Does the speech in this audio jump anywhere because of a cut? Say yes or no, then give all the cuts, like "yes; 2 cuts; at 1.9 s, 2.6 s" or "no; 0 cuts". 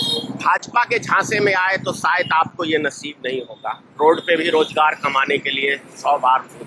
no; 0 cuts